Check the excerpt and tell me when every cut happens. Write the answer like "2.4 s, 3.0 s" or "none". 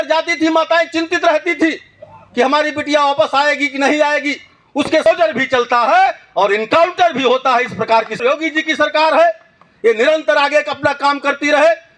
5.1 s, 8.2 s